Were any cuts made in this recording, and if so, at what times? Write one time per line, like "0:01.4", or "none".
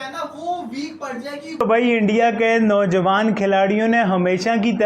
0:01.6